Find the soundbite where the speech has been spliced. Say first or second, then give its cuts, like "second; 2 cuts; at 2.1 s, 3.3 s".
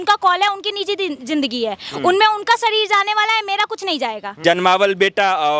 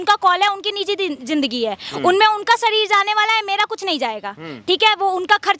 first; 1 cut; at 4.3 s